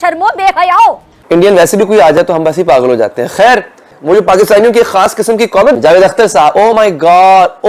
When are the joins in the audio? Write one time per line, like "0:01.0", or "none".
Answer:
0:01.1
0:03.9